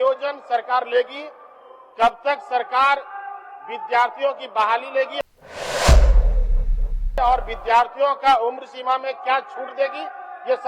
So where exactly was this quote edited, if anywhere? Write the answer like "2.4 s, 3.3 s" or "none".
5.1 s, 7.1 s

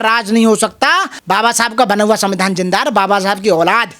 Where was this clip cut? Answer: 1.1 s

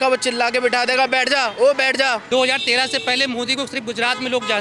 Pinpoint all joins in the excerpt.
2.2 s

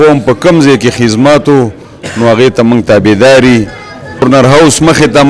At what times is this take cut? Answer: 4.2 s

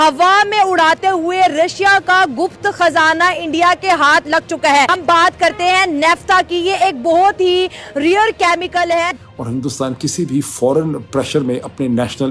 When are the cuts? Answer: 4.9 s, 9.1 s

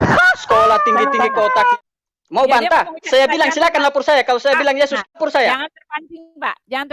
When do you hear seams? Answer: 1.7 s, 5.1 s

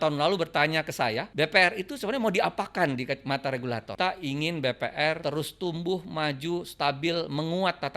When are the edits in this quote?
1.3 s, 3.9 s, 5.2 s

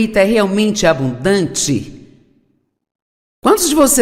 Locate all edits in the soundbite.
2.1 s

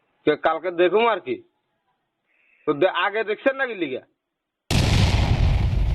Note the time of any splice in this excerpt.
4.7 s

